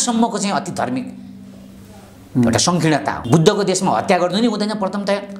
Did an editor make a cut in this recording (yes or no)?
yes